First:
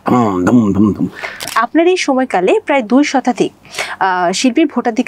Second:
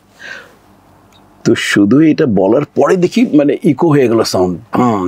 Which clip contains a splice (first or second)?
first